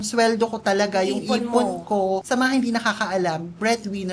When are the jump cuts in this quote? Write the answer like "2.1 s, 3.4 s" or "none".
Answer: 2.2 s